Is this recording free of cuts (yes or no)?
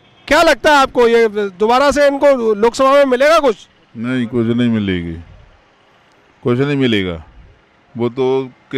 yes